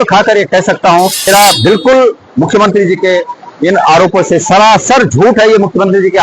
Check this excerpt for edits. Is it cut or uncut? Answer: cut